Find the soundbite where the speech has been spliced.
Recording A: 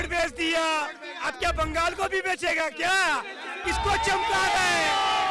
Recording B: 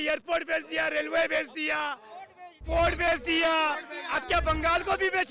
A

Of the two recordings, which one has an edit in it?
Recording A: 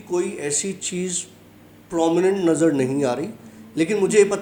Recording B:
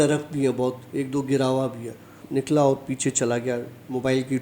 B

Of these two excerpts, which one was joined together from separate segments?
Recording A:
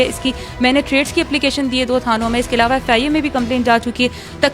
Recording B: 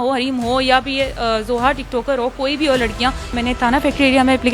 B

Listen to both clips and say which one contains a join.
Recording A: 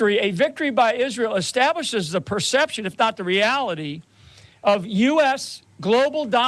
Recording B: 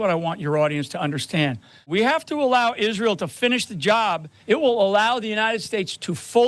B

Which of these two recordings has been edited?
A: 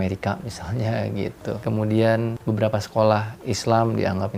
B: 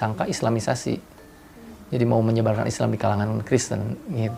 A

